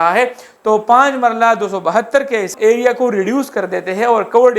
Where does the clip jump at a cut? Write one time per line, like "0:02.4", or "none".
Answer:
0:02.5